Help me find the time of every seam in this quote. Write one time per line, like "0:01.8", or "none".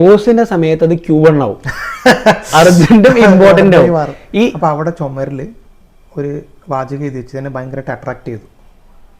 0:04.5